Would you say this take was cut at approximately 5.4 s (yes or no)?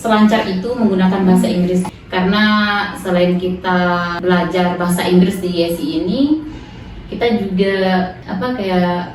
no